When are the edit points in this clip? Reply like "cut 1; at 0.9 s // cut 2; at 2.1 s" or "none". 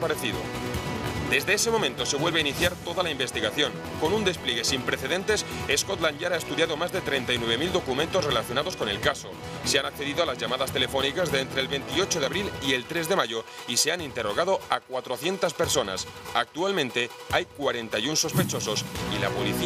cut 1; at 8.9 s

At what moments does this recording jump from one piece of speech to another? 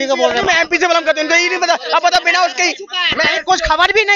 none

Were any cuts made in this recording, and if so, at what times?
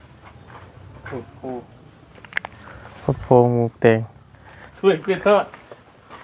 cut 1; at 4.7 s

